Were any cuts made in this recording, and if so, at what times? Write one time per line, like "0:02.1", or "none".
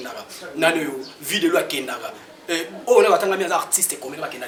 none